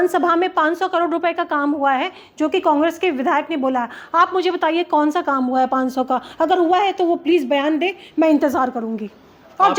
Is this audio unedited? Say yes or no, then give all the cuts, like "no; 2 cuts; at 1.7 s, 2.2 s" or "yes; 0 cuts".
yes; 0 cuts